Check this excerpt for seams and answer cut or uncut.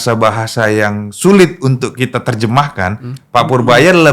uncut